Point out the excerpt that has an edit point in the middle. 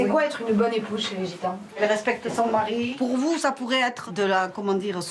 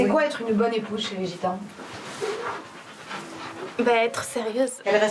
first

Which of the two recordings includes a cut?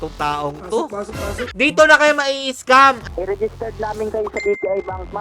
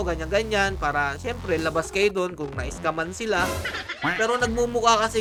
first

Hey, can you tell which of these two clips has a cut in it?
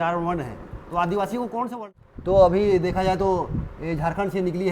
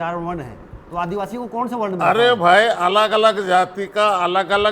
first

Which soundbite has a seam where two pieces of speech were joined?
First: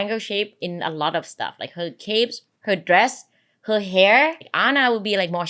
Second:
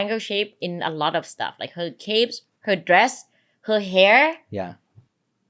first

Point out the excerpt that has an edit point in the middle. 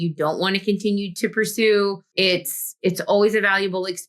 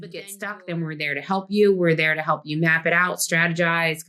first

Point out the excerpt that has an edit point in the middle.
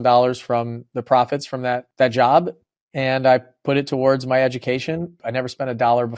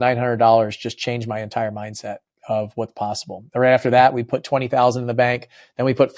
first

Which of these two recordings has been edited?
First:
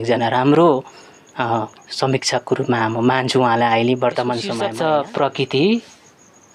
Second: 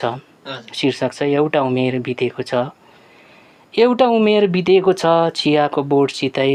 first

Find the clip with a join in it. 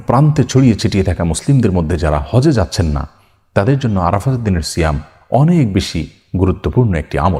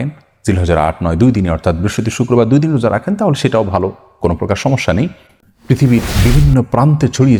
second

